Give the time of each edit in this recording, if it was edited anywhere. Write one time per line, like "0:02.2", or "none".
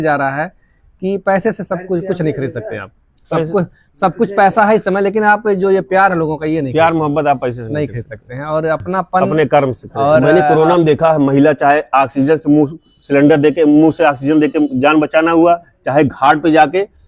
0:10.2